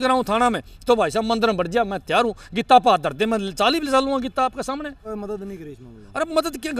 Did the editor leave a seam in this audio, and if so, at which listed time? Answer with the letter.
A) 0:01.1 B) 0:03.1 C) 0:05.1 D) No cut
C